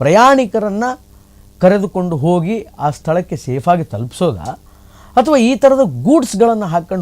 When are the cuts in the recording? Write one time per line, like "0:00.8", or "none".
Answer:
none

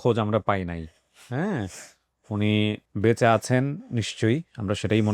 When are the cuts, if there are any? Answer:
0:02.9

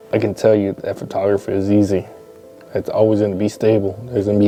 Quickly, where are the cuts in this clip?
none

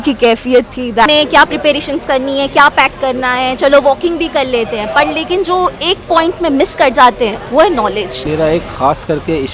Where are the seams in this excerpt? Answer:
0:01.1
0:08.2

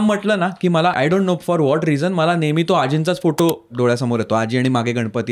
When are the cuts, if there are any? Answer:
0:00.9

